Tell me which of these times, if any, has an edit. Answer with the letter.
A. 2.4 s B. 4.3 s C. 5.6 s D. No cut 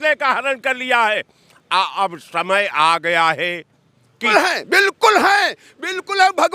B